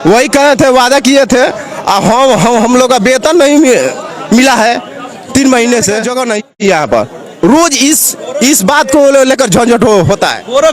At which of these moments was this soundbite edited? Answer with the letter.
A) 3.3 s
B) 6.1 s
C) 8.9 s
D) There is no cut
B